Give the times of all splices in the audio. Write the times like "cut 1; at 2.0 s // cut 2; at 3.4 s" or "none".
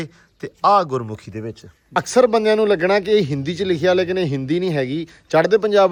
none